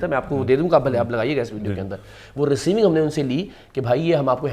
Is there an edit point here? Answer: no; 0 cuts

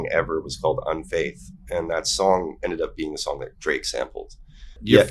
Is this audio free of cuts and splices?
yes; 0 cuts

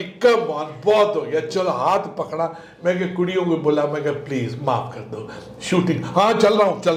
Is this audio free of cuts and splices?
yes; 0 cuts

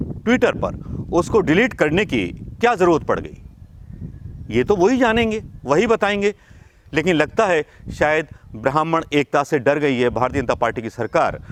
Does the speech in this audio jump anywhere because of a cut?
no; 0 cuts

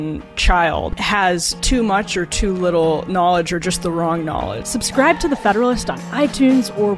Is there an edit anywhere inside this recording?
yes; 2 cuts; at 0.9 s, 4.6 s

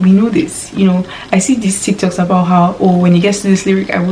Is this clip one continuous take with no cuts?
yes; 0 cuts

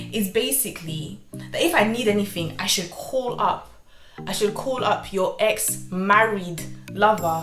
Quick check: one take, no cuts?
yes; 0 cuts

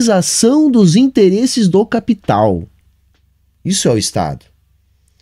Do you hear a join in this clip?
no; 0 cuts

